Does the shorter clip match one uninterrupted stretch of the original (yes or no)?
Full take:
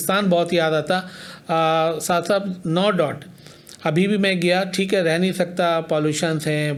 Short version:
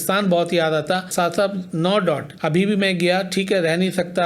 no